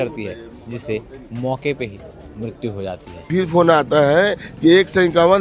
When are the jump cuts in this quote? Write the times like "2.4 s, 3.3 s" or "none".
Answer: 3.3 s